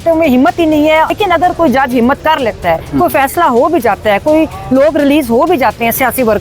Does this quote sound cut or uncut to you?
cut